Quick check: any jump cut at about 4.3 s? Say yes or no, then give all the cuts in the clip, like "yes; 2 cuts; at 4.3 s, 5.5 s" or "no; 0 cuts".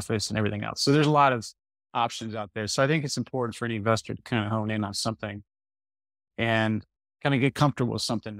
no; 1 cut; at 7.0 s